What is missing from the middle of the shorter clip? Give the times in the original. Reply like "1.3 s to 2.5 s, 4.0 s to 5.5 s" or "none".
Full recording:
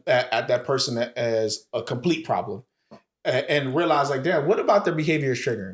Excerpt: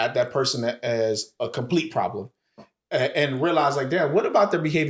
none